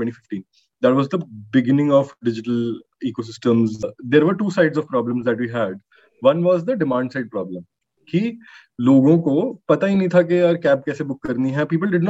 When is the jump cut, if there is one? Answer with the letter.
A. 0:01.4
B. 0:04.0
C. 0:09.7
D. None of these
B